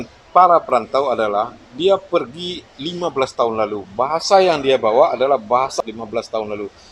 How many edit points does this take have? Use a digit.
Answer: 1